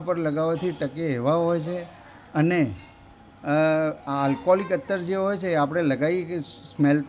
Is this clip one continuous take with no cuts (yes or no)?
yes